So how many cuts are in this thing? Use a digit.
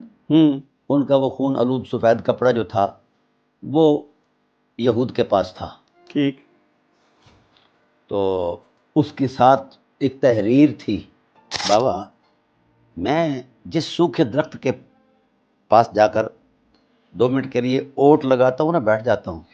1